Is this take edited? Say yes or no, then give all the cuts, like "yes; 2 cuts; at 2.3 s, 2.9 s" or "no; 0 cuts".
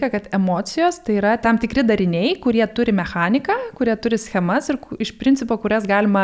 yes; 1 cut; at 1.4 s